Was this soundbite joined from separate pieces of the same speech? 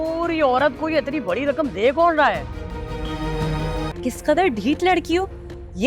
yes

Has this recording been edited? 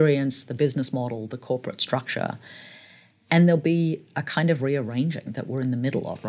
no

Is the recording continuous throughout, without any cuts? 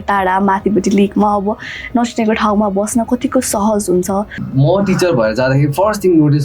no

